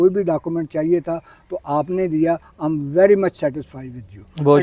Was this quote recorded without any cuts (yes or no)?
yes